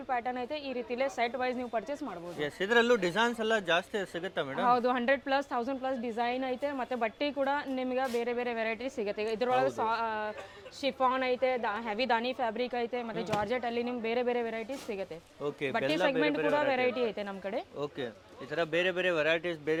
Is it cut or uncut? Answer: uncut